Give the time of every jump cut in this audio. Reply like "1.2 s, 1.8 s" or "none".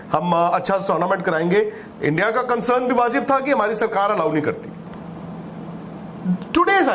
4.7 s